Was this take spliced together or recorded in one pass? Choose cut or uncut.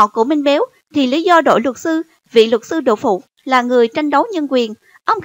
cut